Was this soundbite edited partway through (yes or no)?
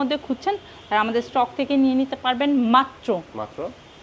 no